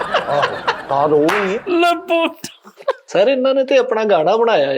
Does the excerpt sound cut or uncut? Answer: cut